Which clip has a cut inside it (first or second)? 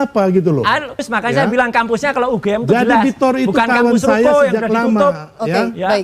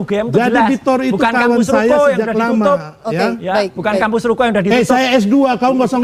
first